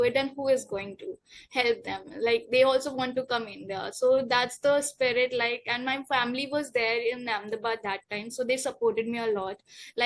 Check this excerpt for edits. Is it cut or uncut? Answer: uncut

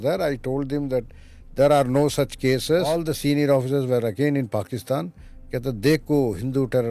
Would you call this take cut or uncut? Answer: cut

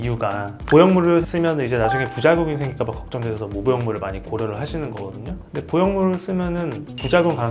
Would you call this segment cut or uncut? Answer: uncut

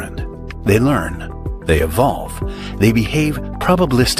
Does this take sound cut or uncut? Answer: uncut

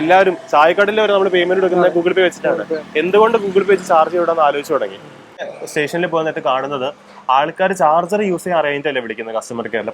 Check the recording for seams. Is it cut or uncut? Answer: cut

